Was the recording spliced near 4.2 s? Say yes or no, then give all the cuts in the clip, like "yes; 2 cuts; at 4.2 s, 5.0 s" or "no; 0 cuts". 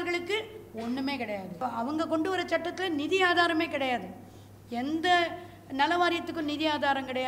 no; 1 cut; at 1.6 s